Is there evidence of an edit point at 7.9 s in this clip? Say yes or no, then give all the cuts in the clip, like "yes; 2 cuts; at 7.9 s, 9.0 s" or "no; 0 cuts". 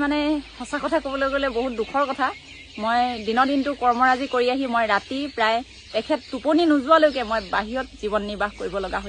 no; 0 cuts